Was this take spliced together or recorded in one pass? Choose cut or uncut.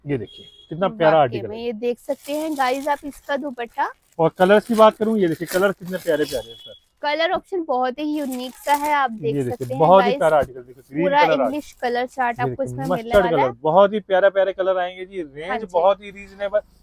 uncut